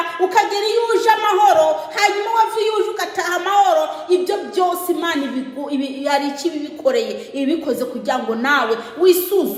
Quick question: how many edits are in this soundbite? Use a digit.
0